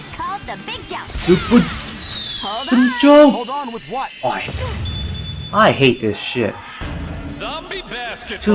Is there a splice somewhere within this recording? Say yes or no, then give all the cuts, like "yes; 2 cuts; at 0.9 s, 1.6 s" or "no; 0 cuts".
no; 0 cuts